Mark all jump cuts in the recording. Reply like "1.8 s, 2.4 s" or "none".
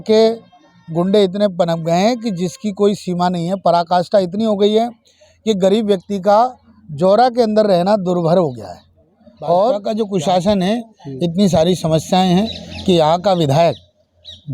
9.8 s